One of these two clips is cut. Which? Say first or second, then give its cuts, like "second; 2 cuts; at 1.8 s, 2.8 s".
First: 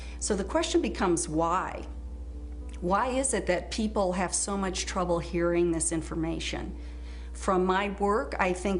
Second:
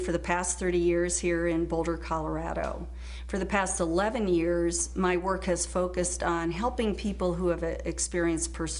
first; 1 cut; at 1.7 s